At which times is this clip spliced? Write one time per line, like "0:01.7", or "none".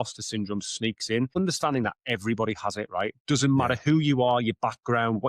0:01.4

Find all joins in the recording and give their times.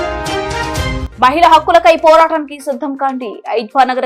0:01.0

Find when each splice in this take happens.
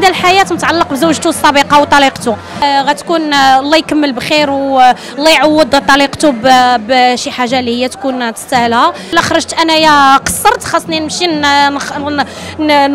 0:02.6
0:09.1

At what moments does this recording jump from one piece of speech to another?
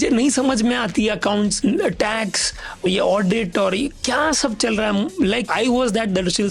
0:01.5
0:02.9
0:05.4

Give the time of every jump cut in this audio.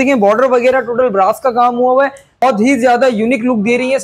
0:02.4

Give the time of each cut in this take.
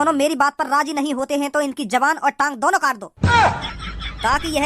0:03.1

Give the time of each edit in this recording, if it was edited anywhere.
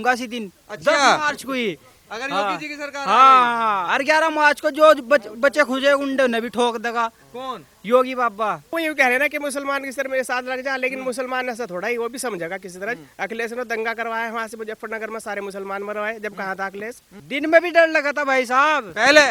0:08.8
0:17.1

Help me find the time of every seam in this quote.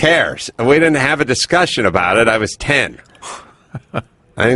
none

